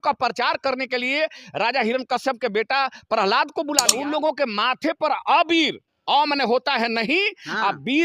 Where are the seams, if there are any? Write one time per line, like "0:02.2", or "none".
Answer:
0:03.9